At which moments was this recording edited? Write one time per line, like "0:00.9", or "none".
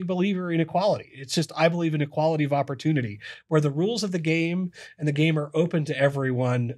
none